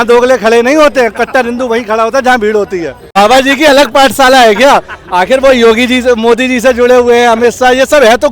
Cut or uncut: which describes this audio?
cut